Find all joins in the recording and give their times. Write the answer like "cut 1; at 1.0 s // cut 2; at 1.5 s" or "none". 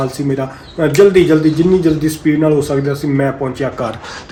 none